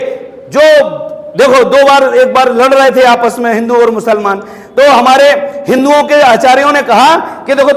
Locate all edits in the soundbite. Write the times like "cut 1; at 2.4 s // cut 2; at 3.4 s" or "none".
none